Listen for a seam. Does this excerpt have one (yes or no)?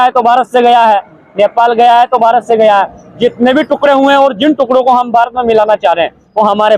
no